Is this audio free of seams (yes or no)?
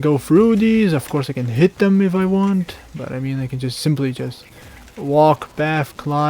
yes